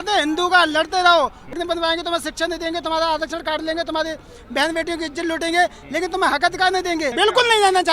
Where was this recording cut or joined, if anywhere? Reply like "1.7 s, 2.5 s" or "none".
1.5 s, 7.1 s